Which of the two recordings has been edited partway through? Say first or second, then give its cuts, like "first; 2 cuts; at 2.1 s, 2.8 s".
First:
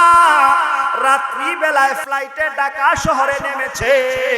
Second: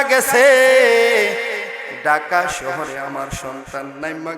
first; 1 cut; at 2.0 s